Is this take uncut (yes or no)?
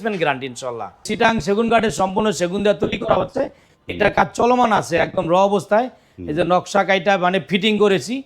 no